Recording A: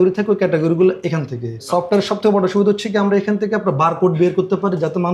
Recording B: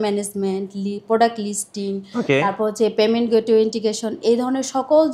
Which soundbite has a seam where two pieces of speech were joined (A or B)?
A